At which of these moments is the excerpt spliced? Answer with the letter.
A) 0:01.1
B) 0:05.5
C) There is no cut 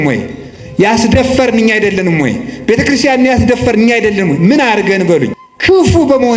B